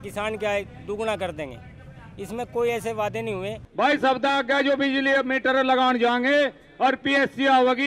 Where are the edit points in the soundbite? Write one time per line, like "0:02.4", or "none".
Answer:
0:03.6

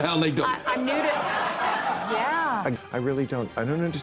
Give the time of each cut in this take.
0:02.7

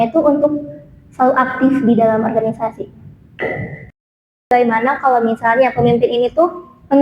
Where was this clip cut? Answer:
0:04.5

